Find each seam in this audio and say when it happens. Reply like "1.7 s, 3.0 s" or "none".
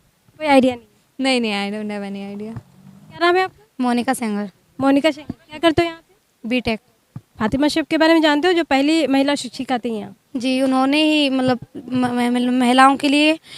3.2 s